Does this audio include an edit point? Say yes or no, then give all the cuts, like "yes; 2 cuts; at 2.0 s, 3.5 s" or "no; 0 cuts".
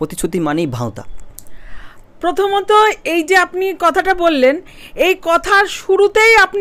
no; 0 cuts